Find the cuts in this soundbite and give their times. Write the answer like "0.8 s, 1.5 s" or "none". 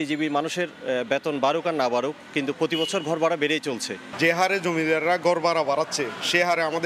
none